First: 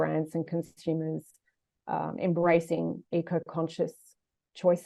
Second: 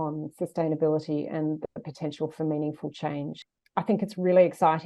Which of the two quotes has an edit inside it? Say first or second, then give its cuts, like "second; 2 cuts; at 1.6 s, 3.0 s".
second; 1 cut; at 3.4 s